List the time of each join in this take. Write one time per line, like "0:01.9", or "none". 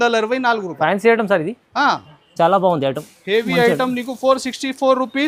none